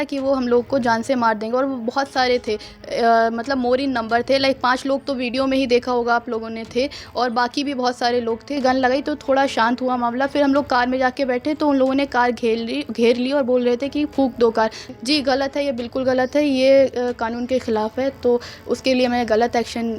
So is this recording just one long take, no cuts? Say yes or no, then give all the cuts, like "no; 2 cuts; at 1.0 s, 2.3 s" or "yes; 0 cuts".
no; 2 cuts; at 8.5 s, 14.8 s